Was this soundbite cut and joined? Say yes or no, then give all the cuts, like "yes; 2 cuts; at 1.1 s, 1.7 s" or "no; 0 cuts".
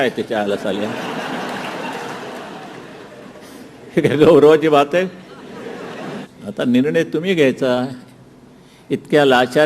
yes; 1 cut; at 6.3 s